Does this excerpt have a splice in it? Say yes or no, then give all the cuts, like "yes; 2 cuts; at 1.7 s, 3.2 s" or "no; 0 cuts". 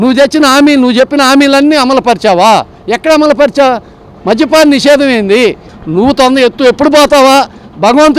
yes; 1 cut; at 5.7 s